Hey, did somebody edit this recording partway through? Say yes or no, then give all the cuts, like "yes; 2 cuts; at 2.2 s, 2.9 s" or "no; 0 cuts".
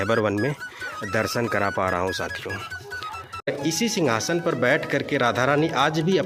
yes; 1 cut; at 3.5 s